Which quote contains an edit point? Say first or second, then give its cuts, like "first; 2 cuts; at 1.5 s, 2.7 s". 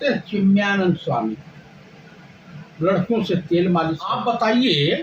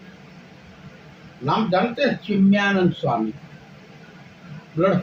first; 1 cut; at 4.1 s